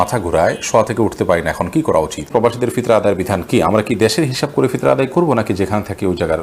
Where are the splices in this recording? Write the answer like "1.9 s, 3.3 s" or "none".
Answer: 1.9 s